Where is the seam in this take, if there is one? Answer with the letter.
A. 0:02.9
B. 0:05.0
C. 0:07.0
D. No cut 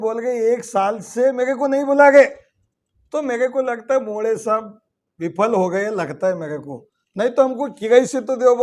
D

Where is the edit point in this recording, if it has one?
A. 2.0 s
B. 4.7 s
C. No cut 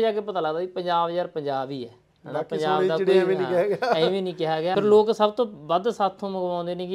B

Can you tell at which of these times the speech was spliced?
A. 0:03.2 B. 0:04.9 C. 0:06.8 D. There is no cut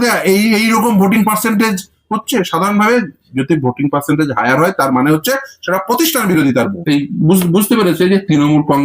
C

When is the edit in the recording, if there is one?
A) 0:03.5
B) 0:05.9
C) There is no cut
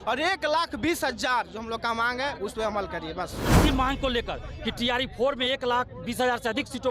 A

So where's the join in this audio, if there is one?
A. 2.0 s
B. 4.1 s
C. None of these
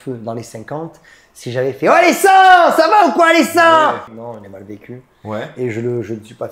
B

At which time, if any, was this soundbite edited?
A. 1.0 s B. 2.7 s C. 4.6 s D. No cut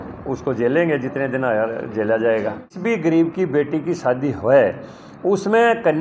B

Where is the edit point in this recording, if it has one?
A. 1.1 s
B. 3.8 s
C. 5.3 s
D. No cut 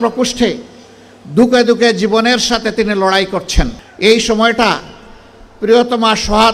B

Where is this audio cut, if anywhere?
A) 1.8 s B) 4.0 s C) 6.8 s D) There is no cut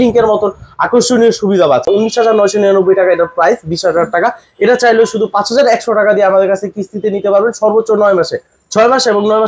A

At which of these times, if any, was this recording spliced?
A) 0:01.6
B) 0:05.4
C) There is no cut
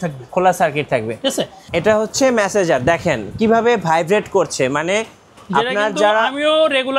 A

